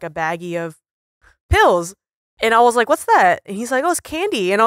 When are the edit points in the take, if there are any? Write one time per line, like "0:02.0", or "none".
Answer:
none